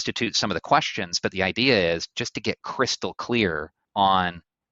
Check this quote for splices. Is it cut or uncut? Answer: cut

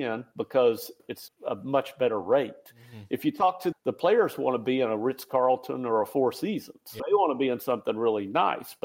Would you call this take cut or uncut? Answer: cut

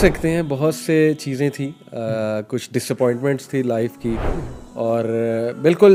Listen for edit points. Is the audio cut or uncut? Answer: uncut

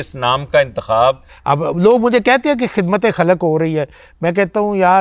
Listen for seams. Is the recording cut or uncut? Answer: cut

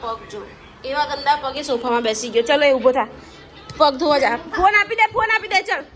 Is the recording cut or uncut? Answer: uncut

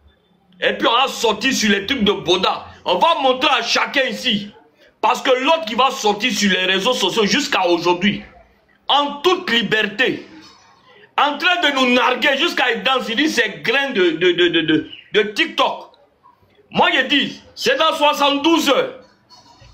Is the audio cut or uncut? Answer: uncut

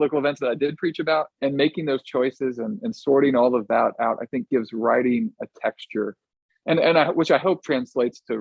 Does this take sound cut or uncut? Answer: cut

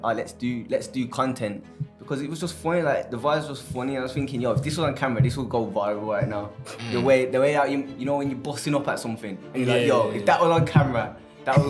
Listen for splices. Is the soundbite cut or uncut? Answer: uncut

